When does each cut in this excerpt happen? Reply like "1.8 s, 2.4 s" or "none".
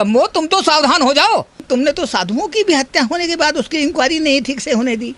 1.6 s

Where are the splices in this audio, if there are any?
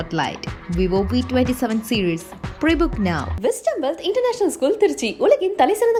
none

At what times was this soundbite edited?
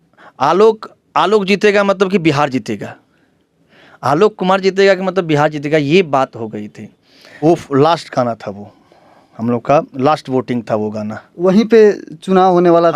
7.4 s

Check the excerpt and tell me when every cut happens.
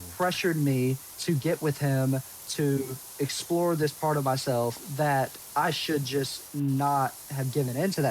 1.1 s, 3.0 s, 5.4 s

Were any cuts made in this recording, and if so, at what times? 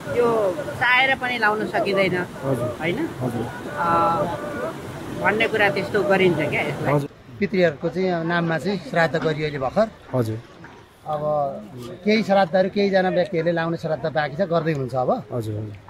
7.0 s, 13.5 s

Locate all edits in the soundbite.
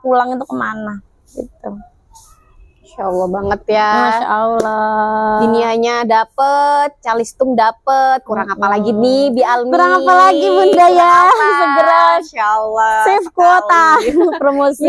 none

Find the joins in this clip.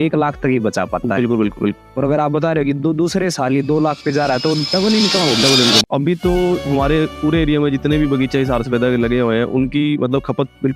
5.8 s

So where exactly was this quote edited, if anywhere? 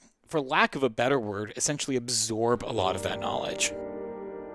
3.5 s

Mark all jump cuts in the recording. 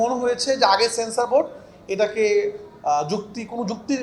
none

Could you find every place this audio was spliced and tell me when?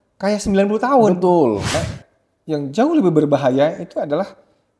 1.8 s

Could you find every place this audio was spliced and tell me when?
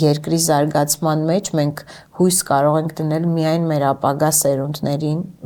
none

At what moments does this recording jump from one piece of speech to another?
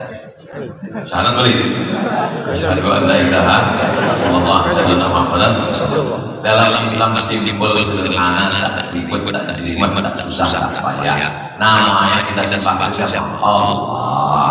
none

